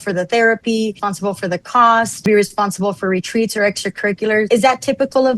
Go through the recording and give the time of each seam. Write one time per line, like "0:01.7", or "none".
0:01.1
0:02.3
0:04.5